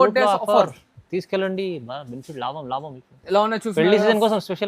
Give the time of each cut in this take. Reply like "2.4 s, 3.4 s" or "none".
none

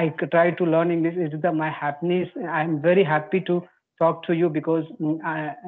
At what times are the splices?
none

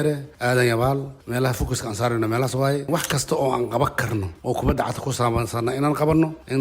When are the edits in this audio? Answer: 2.8 s

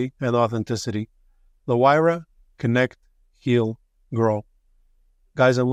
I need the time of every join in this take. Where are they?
none

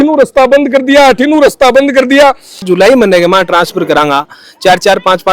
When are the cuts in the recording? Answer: 2.6 s

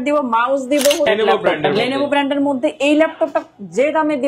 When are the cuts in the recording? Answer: 1.1 s

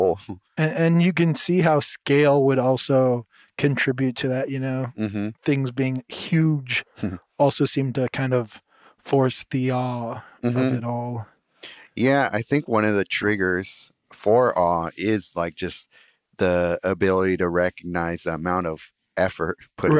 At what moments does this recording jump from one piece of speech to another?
none

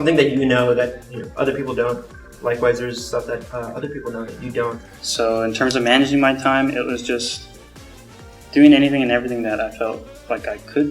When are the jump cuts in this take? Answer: 4.8 s

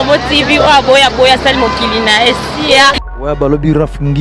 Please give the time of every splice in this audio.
3.0 s

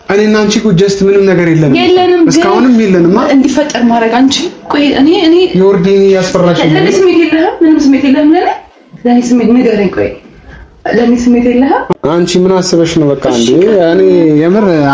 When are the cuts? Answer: 11.9 s

